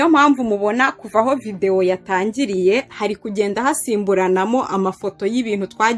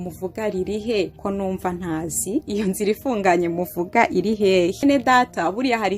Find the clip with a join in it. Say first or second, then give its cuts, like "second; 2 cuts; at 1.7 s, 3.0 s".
second; 3 cuts; at 1.2 s, 2.5 s, 4.8 s